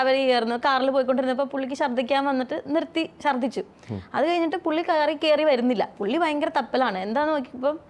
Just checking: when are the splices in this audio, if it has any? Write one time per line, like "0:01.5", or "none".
none